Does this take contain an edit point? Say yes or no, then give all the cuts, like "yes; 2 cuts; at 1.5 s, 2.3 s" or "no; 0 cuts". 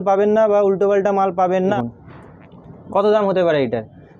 yes; 1 cut; at 1.8 s